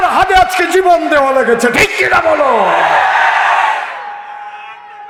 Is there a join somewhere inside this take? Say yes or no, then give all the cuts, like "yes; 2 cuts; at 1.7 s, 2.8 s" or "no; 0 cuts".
no; 0 cuts